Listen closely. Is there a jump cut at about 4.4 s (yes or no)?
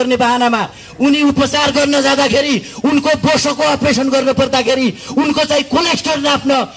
no